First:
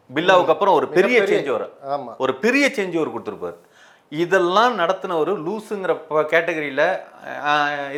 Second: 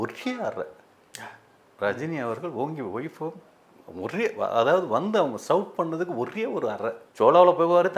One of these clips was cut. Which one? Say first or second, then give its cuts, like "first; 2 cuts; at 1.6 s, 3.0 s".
second; 2 cuts; at 1.6 s, 7.0 s